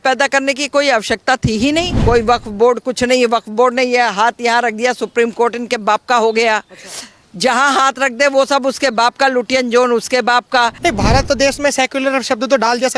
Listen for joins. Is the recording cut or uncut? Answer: cut